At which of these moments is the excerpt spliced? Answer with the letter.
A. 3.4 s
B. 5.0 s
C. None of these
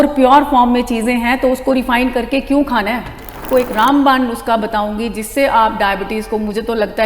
A